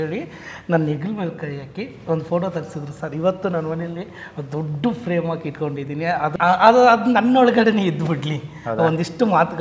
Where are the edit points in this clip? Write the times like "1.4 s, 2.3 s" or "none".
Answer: 6.3 s